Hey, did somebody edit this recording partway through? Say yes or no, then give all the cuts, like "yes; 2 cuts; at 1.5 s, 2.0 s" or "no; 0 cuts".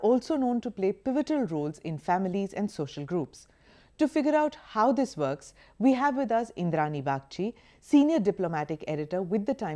yes; 1 cut; at 8.6 s